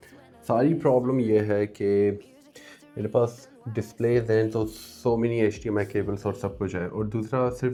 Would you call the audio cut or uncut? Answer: uncut